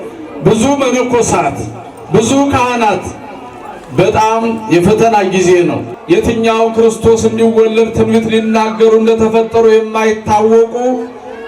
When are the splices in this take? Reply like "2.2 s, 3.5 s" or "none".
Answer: 5.9 s